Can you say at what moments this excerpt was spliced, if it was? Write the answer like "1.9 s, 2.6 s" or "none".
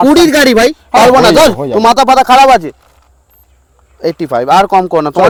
none